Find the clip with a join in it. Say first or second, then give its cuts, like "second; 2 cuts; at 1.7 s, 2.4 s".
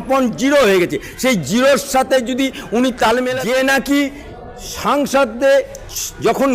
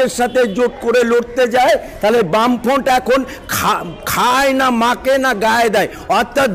first; 1 cut; at 3.3 s